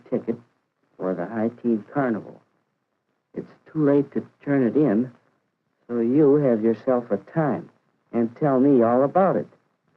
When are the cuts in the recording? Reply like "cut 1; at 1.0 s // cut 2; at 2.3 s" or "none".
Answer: cut 1; at 6.5 s